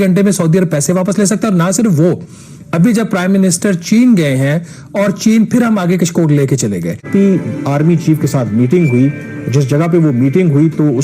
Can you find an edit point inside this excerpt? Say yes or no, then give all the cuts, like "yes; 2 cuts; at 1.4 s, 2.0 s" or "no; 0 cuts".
yes; 1 cut; at 7.0 s